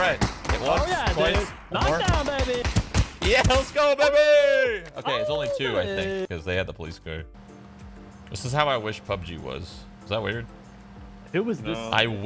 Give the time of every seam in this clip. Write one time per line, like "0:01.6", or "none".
0:07.4

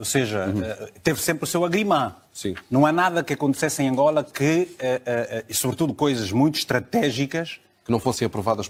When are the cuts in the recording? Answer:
none

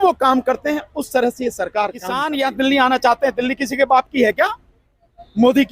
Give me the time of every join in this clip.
0:02.2

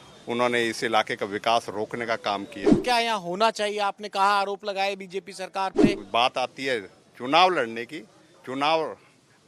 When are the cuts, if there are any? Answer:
0:02.8
0:06.0

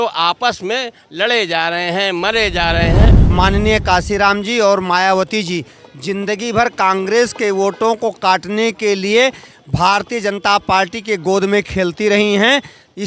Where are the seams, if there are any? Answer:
0:03.2

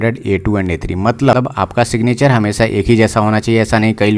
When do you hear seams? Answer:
0:01.3

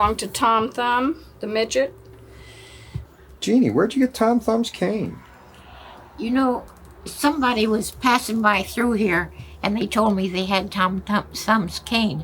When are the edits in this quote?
0:03.1

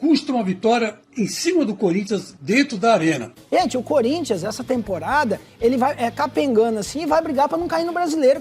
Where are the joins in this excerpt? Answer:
0:03.4

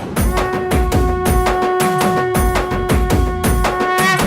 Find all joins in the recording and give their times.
0:02.3

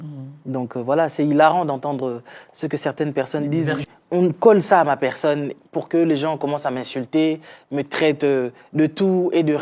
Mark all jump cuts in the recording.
0:03.8

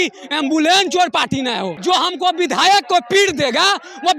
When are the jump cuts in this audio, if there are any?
0:01.7

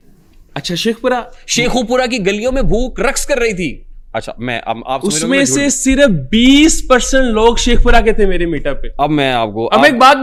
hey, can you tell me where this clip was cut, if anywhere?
none

